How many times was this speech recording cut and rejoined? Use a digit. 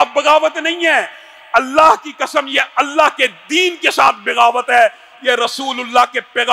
0